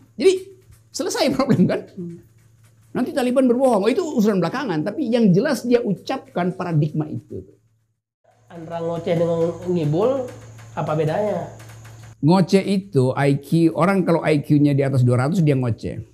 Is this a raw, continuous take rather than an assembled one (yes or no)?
no